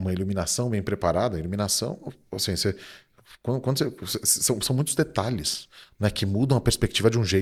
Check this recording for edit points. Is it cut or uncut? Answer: uncut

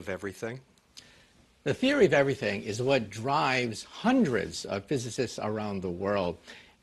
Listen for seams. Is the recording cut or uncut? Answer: uncut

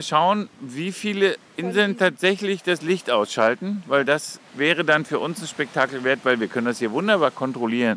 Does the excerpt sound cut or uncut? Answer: cut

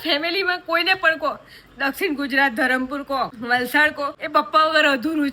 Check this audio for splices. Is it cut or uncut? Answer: cut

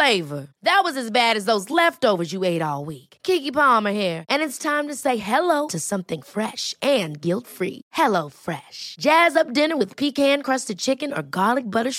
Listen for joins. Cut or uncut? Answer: uncut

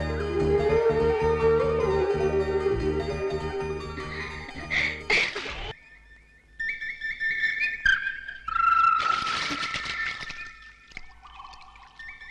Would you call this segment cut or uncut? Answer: cut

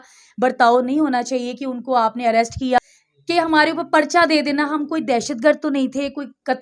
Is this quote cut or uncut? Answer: cut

